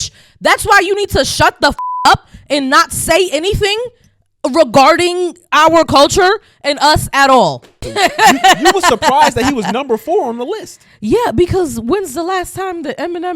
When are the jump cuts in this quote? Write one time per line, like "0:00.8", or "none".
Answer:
0:07.8

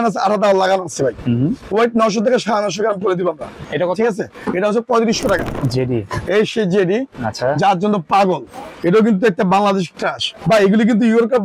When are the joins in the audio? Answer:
0:03.6
0:05.6
0:10.3

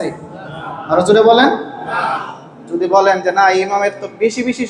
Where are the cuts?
none

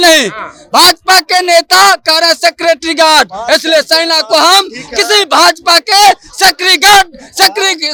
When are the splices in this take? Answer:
none

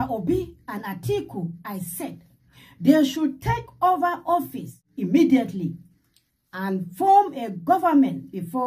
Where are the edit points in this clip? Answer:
0:04.9

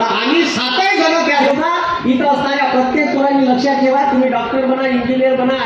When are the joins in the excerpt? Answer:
0:01.4

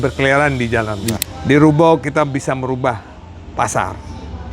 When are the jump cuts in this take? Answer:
0:01.2

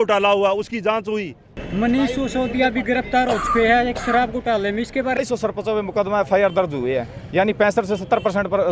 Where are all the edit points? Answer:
0:01.5
0:05.2

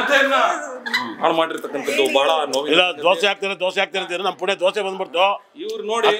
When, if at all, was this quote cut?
none

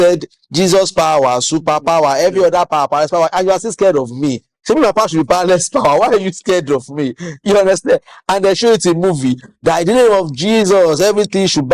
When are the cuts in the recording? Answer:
none

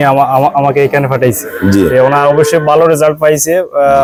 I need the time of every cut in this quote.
none

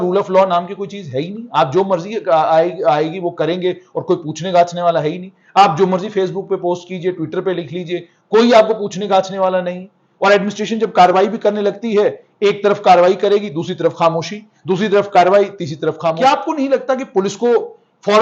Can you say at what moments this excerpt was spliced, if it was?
0:16.2

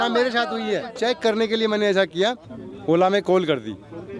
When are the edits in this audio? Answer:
0:00.9
0:02.5

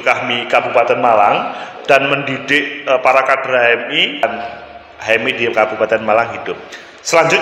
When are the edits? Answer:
0:04.2

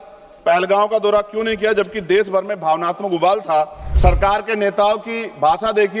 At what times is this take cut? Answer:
0:03.8

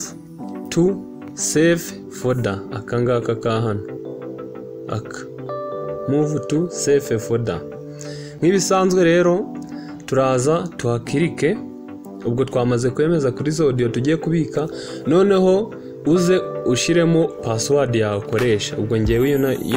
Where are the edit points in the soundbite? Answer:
none

